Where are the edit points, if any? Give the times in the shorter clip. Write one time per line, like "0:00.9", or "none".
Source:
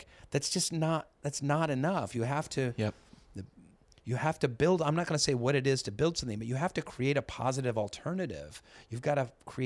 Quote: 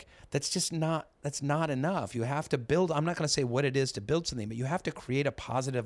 0:02.5